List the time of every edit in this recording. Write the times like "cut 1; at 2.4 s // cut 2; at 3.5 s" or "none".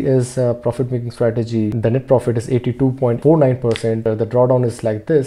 cut 1; at 1.7 s // cut 2; at 3.2 s // cut 3; at 4.0 s